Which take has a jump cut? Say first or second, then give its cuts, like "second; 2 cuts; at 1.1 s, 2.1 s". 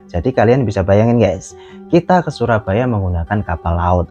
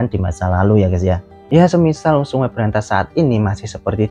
second; 1 cut; at 1.3 s